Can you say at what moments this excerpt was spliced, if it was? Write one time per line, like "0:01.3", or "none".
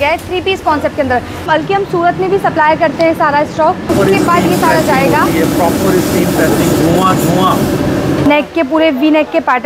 0:01.4
0:03.9
0:08.3